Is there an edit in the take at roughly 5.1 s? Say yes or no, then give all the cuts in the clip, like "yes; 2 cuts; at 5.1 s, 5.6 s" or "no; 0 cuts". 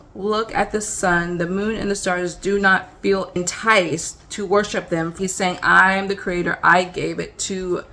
yes; 2 cuts; at 3.4 s, 5.1 s